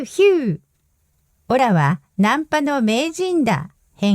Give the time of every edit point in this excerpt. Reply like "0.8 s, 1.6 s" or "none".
1.6 s